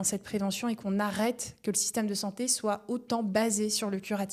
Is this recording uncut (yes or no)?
yes